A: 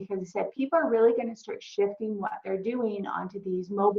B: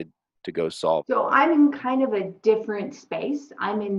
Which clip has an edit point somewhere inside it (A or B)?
B